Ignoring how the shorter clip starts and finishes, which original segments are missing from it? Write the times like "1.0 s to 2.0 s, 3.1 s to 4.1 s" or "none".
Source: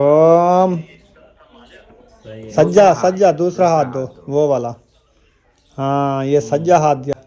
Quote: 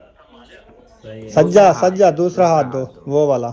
none